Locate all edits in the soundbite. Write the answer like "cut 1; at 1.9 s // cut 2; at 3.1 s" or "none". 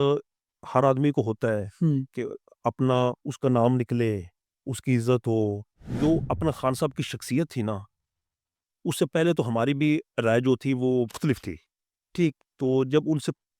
cut 1; at 3.3 s // cut 2; at 5.8 s // cut 3; at 11.2 s